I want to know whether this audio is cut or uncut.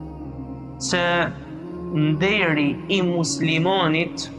cut